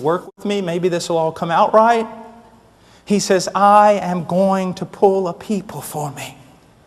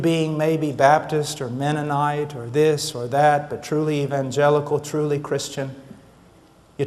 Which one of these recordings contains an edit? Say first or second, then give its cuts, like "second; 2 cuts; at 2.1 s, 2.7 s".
first; 1 cut; at 1.7 s